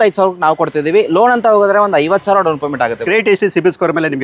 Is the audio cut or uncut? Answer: cut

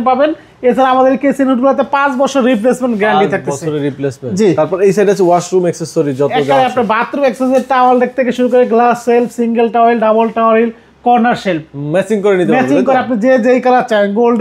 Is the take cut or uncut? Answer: uncut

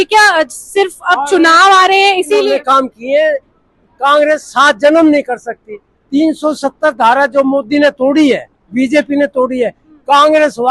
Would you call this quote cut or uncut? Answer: cut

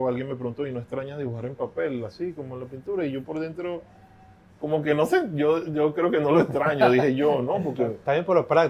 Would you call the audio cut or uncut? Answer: uncut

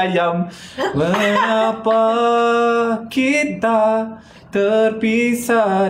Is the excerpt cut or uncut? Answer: uncut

